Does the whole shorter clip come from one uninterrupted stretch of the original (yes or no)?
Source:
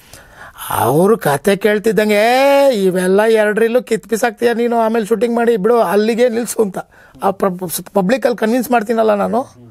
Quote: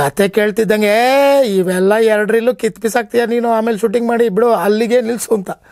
yes